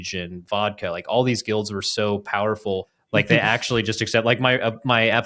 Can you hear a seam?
yes; 1 cut; at 3.0 s

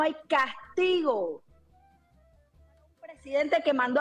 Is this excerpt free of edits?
yes; 0 cuts

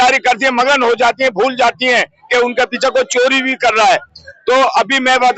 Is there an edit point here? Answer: no; 0 cuts

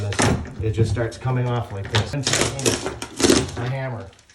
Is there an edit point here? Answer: yes; 1 cut; at 2.1 s

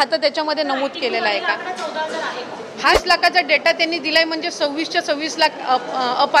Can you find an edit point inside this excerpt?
yes; 1 cut; at 3.0 s

